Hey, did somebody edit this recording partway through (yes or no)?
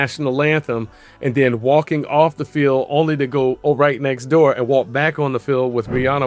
no